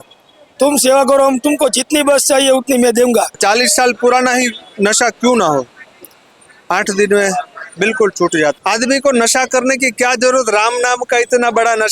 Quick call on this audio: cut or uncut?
cut